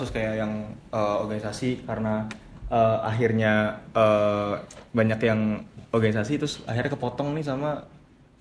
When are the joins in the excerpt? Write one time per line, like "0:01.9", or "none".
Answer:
none